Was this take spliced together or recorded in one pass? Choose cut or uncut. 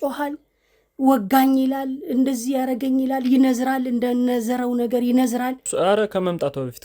cut